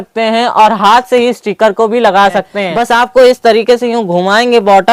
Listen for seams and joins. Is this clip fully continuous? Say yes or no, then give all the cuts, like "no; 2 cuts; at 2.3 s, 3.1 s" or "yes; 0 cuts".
no; 1 cut; at 2.5 s